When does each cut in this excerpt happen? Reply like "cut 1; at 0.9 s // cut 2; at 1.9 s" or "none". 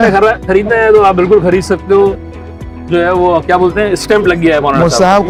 none